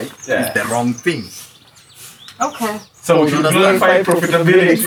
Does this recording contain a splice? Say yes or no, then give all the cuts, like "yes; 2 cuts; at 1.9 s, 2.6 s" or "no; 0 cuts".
no; 0 cuts